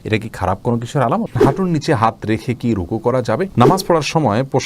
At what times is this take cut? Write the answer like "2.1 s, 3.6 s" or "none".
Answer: 1.4 s, 3.5 s